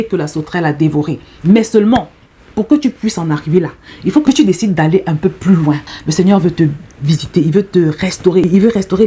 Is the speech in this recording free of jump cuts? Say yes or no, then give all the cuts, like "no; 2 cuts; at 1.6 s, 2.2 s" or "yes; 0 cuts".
no; 2 cuts; at 4.2 s, 5.9 s